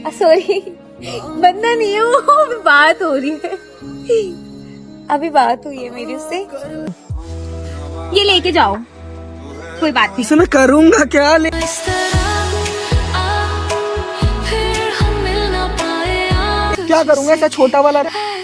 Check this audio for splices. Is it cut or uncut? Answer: cut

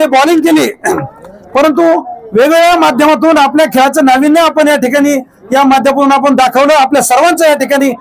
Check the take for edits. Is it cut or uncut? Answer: uncut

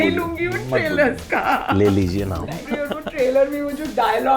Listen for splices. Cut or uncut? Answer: cut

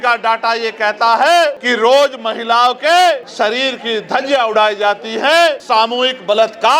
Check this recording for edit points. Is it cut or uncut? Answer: cut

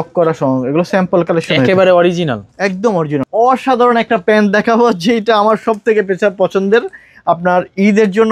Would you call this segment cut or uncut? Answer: cut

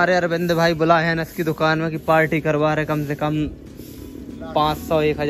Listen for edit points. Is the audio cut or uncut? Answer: uncut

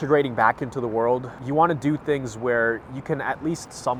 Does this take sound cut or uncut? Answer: uncut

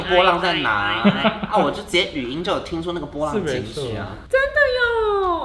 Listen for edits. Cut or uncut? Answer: uncut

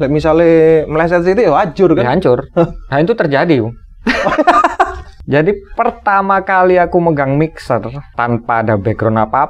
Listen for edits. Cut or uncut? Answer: cut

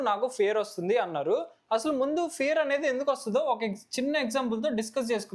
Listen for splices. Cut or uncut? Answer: uncut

